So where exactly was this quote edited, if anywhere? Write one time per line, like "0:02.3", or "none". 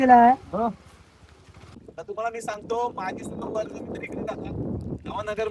0:01.9